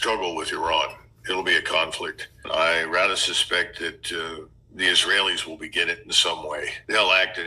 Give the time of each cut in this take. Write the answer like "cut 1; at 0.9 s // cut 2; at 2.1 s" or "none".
cut 1; at 2.4 s